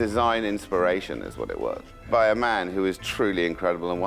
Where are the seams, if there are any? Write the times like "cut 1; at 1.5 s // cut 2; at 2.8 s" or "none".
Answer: cut 1; at 2.1 s

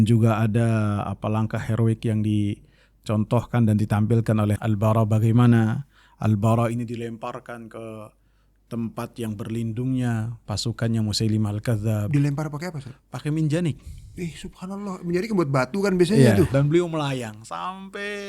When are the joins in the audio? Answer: cut 1; at 4.6 s // cut 2; at 16.5 s

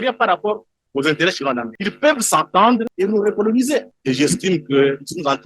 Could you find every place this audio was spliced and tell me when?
cut 1; at 1.7 s // cut 2; at 2.9 s // cut 3; at 3.9 s

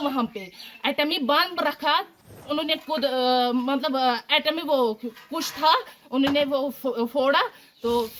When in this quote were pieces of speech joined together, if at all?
cut 1; at 2.4 s

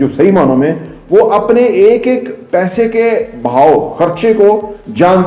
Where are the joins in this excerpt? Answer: none

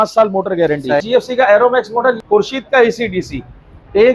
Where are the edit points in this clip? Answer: cut 1; at 1.0 s // cut 2; at 2.2 s

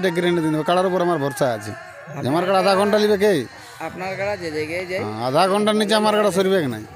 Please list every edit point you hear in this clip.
none

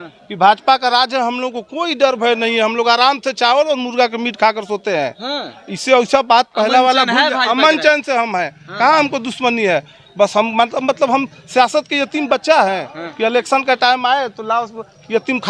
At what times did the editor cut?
none

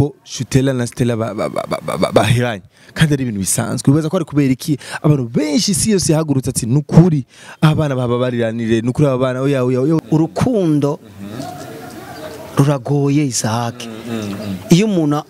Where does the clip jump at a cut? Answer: cut 1; at 10.0 s

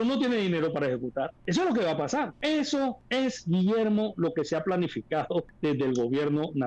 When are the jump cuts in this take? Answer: cut 1; at 1.4 s // cut 2; at 2.3 s // cut 3; at 3.0 s // cut 4; at 5.5 s

